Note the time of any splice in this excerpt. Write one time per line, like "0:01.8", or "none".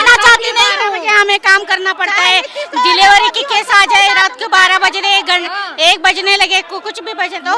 none